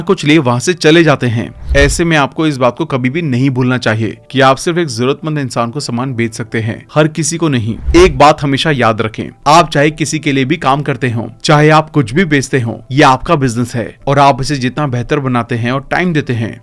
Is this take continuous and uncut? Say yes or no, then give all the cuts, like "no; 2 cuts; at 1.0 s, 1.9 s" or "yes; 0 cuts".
no; 2 cuts; at 1.6 s, 7.7 s